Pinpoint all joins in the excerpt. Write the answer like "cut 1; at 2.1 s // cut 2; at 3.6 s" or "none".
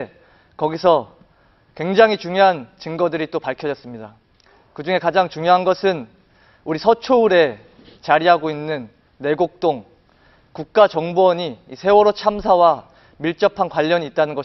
none